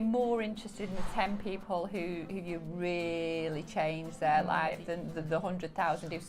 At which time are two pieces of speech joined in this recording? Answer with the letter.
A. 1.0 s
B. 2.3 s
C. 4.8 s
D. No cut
C